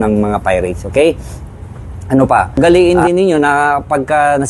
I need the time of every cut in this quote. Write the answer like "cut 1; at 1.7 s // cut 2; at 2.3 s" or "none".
cut 1; at 2.6 s